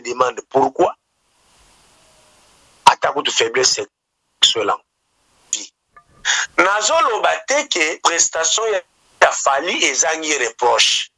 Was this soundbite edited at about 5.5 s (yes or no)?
yes